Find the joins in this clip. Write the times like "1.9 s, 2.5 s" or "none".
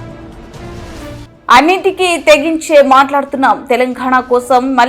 1.2 s